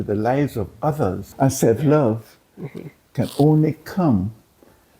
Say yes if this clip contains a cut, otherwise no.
yes